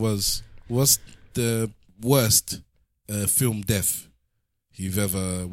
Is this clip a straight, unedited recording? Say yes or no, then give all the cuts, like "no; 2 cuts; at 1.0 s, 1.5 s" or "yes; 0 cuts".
no; 1 cut; at 1.9 s